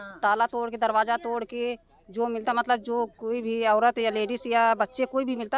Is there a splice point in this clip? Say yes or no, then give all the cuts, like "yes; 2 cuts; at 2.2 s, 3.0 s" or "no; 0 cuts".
no; 0 cuts